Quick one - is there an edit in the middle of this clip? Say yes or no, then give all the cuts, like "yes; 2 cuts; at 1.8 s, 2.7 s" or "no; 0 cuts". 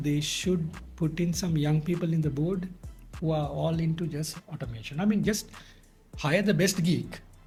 no; 0 cuts